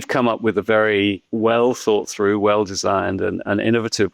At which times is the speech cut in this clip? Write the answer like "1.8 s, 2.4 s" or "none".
1.2 s